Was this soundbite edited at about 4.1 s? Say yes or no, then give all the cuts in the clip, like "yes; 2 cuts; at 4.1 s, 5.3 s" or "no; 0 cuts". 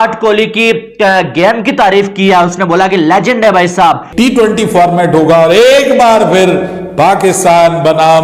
yes; 1 cut; at 4.1 s